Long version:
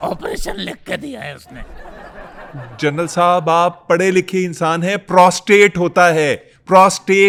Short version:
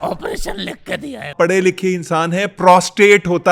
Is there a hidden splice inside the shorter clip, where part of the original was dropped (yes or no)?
yes